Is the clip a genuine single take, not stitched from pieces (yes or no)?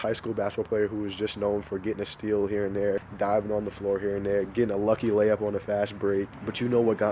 no